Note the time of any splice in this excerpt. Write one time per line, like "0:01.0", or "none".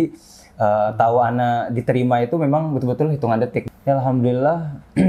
0:03.6